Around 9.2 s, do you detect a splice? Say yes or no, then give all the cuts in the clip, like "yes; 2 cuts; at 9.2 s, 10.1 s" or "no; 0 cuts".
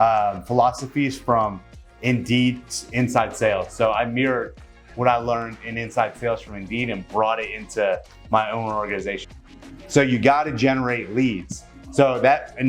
yes; 1 cut; at 9.2 s